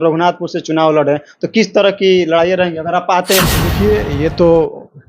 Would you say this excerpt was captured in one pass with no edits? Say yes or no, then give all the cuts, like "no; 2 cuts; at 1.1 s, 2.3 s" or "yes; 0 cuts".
no; 1 cut; at 3.6 s